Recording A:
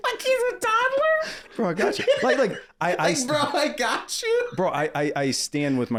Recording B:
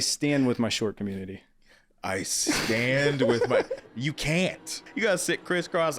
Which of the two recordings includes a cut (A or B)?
B